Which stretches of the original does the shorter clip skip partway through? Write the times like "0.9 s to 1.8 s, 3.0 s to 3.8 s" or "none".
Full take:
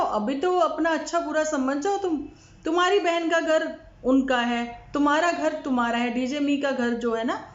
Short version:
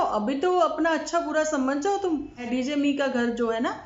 2.5 s to 6.1 s